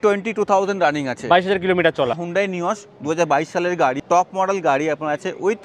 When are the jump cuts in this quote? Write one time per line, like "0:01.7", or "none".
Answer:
0:02.1
0:04.0